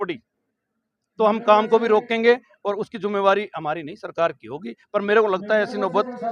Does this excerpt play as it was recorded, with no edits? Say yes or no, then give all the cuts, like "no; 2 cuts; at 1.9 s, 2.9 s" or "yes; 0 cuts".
yes; 0 cuts